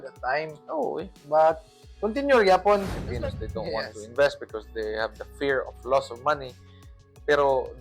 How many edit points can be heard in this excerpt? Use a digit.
1